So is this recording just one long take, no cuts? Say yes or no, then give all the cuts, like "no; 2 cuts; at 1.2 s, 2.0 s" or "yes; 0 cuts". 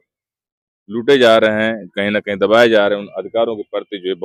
yes; 0 cuts